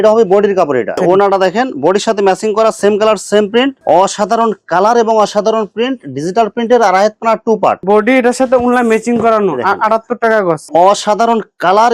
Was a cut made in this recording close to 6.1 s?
no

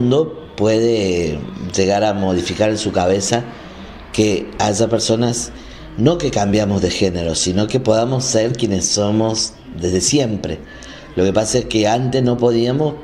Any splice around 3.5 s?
no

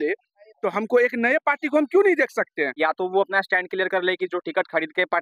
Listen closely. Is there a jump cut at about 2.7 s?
yes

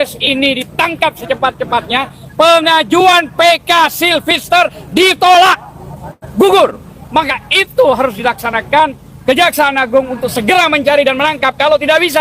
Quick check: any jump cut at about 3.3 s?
no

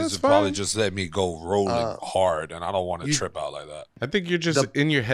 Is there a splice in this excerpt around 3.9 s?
yes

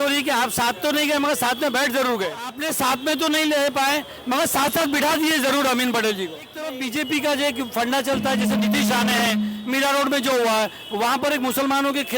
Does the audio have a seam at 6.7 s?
yes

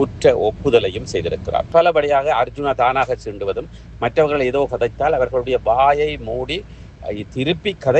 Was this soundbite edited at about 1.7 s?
yes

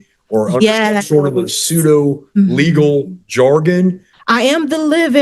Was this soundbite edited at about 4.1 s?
yes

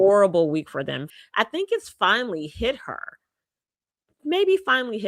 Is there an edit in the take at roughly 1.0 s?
yes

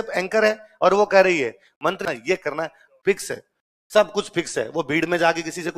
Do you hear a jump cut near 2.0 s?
yes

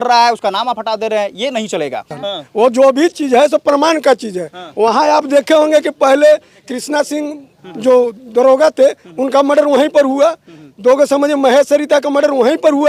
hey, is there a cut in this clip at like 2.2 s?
yes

